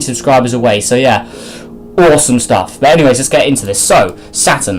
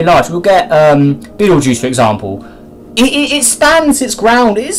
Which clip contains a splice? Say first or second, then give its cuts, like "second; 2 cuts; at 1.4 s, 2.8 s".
first; 1 cut; at 2.5 s